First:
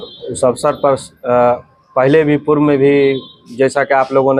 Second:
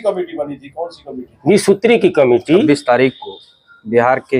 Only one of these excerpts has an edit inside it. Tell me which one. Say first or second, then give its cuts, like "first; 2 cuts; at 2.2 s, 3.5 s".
second; 1 cut; at 2.7 s